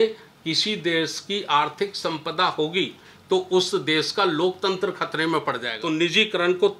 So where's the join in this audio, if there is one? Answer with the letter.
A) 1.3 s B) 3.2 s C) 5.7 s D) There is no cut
C